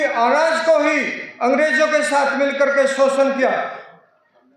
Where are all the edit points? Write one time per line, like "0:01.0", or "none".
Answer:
none